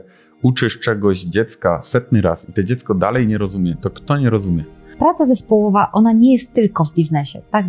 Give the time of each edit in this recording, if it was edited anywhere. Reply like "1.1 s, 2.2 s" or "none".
4.9 s